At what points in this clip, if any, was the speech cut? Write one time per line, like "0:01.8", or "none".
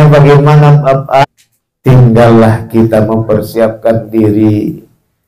0:01.2